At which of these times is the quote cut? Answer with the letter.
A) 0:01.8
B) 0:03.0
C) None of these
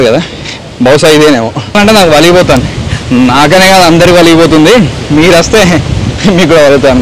A